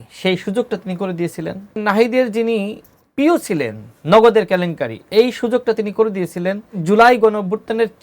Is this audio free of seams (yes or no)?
no